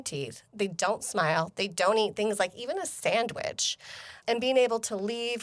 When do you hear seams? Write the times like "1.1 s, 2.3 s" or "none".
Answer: none